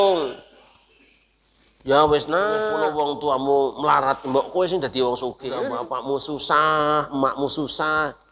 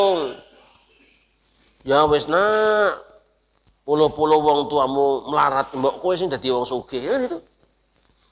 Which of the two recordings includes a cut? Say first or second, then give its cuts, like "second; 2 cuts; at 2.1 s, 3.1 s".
first; 2 cuts; at 2.8 s, 5.7 s